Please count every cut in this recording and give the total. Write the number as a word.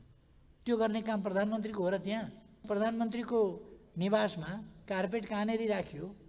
one